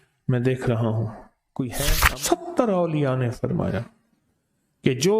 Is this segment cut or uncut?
cut